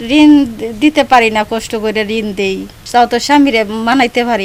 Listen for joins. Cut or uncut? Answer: uncut